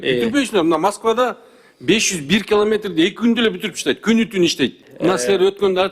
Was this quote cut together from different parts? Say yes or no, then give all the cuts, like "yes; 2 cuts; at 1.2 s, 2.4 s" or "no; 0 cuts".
yes; 1 cut; at 4.9 s